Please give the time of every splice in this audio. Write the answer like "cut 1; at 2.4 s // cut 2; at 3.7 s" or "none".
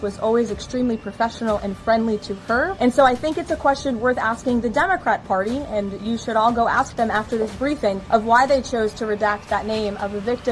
none